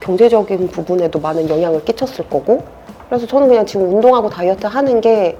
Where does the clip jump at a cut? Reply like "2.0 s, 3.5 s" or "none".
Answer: none